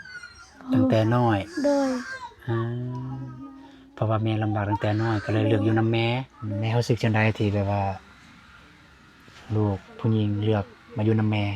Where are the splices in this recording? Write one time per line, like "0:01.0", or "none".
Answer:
0:06.3